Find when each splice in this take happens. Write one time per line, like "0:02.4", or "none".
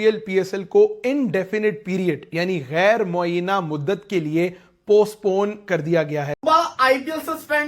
0:06.3